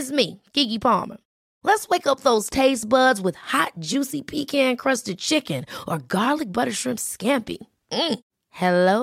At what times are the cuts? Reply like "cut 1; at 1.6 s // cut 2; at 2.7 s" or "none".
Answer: none

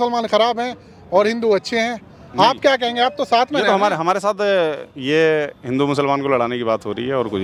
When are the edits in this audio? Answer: none

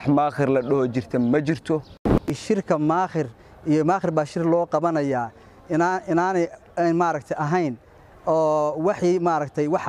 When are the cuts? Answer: cut 1; at 2.3 s

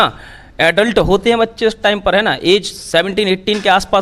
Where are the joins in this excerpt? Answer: none

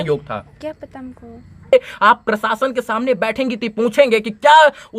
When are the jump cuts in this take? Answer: cut 1; at 1.7 s

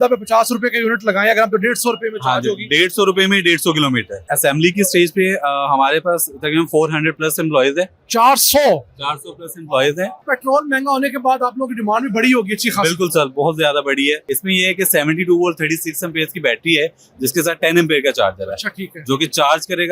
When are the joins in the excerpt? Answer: cut 1; at 4.3 s // cut 2; at 10.2 s // cut 3; at 14.3 s

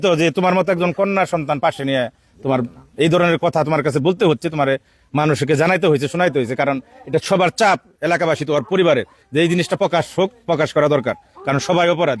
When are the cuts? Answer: none

